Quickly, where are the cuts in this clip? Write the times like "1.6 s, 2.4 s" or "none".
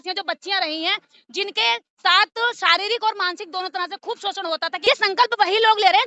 4.8 s